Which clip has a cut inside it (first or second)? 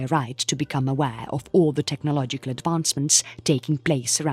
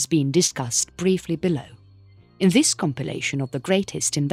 first